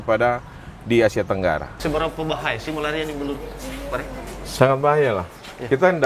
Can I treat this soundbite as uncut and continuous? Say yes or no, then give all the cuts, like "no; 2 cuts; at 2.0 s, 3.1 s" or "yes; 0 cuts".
no; 1 cut; at 1.7 s